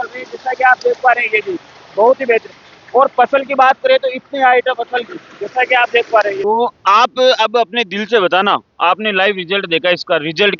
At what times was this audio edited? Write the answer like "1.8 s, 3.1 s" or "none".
6.4 s